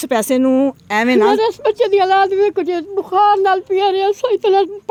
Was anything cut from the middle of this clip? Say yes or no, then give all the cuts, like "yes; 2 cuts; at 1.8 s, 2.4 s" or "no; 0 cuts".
no; 0 cuts